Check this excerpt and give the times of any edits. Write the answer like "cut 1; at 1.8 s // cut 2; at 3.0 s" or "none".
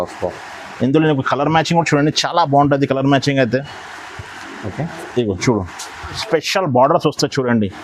cut 1; at 6.2 s